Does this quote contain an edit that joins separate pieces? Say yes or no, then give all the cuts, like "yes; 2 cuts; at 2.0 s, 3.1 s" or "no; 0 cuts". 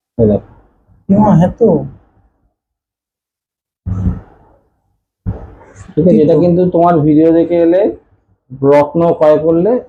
no; 0 cuts